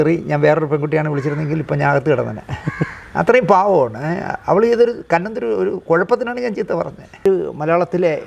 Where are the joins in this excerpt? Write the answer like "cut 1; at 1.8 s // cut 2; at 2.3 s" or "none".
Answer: cut 1; at 7.2 s